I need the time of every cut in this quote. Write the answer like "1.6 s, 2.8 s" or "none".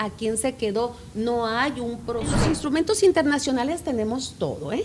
2.4 s